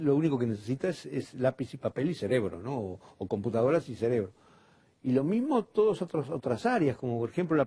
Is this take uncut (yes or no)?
no